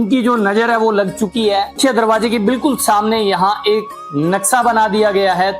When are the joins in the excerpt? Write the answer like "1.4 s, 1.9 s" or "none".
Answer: 1.8 s